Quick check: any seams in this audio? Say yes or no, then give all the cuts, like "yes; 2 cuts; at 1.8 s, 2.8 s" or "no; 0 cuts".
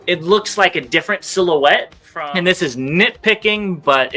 yes; 1 cut; at 2.0 s